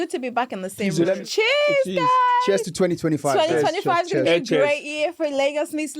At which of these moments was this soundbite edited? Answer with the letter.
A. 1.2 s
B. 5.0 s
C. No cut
A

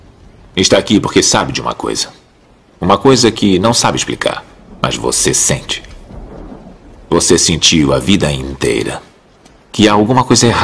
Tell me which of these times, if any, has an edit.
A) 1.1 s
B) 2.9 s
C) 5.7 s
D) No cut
B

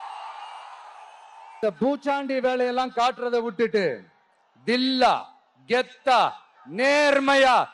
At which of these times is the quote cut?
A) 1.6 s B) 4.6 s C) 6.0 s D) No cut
A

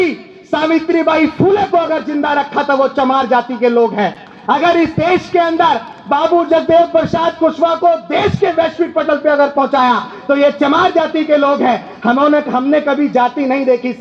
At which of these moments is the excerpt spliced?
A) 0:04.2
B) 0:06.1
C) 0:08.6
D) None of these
D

